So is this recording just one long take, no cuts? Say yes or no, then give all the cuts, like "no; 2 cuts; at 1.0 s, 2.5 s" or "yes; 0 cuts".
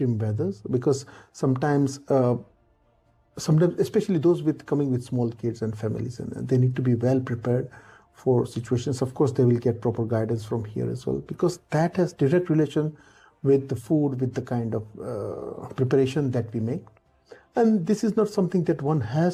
yes; 0 cuts